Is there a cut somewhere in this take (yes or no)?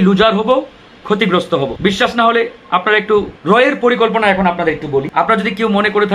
yes